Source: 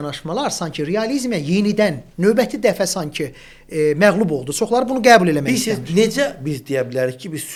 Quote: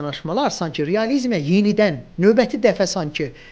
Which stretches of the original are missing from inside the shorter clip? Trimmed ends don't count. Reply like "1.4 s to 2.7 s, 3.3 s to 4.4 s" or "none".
none